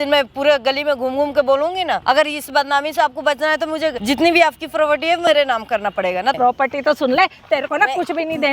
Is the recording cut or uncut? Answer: cut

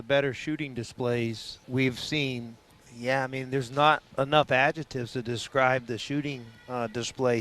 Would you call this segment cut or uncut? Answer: cut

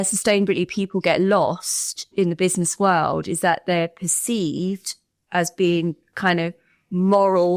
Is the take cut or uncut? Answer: uncut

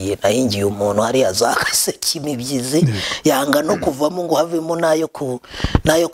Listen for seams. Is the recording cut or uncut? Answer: uncut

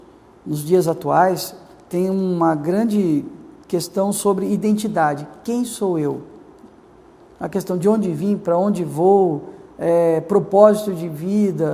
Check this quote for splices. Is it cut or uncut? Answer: uncut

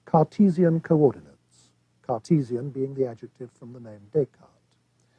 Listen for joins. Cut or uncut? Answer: cut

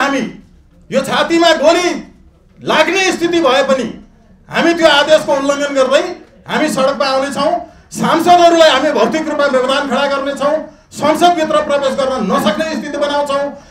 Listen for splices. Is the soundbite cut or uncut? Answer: uncut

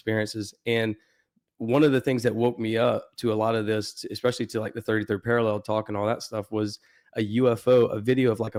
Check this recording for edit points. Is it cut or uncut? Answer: uncut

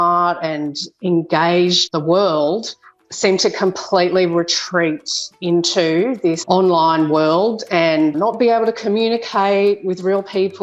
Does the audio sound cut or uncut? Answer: cut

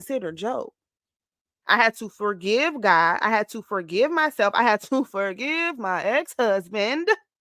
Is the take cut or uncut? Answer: cut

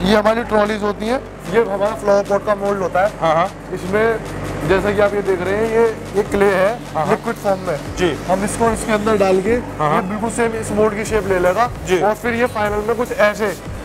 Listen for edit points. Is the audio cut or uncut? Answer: cut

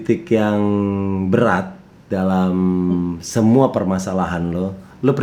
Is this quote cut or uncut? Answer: uncut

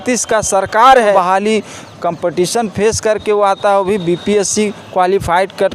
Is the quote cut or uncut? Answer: cut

